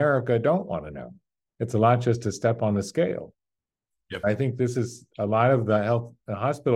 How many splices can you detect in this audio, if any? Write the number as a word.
zero